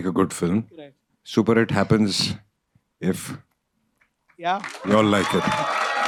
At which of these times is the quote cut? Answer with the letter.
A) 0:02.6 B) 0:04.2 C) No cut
C